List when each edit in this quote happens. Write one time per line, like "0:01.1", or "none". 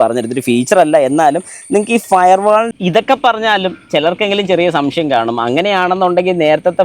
0:02.7